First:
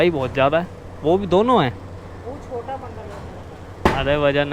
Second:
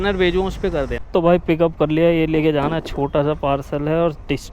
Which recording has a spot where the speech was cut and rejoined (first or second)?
second